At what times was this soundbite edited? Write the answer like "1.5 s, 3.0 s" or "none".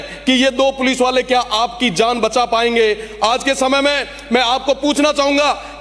none